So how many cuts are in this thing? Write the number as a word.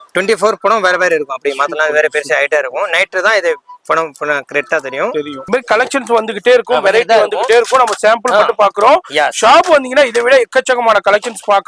one